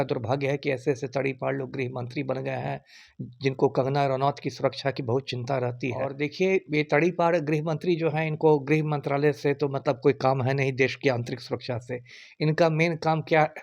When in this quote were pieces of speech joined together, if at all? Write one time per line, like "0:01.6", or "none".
0:06.1